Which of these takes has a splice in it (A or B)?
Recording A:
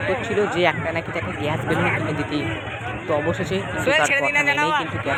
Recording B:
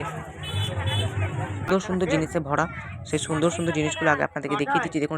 B